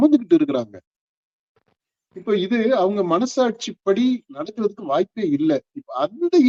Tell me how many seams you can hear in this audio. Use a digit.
0